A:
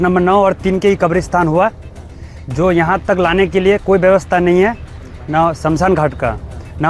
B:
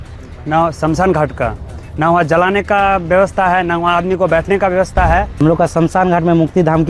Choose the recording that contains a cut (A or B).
B